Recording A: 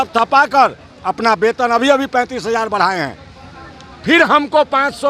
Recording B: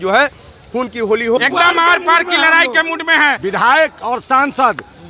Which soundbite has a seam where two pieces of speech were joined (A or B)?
B